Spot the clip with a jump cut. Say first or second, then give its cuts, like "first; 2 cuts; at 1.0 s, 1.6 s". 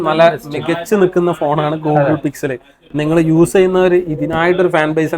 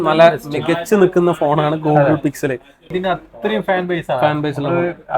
second; 1 cut; at 2.8 s